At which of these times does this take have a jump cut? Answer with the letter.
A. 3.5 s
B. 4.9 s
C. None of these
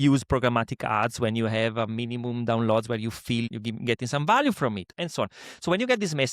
A